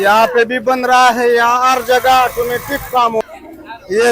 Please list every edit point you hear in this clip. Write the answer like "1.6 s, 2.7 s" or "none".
3.2 s